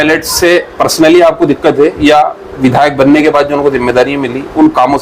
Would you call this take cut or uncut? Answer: uncut